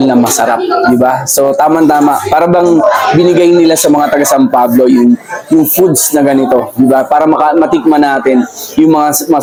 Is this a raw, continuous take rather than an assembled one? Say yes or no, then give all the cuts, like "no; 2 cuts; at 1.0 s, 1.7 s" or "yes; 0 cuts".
yes; 0 cuts